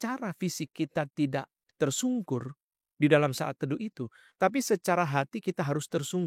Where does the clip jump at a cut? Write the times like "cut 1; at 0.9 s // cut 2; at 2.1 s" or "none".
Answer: none